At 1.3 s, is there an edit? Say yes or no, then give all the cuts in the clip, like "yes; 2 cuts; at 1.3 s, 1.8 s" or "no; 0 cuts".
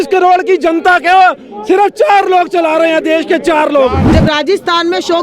no; 1 cut; at 4.0 s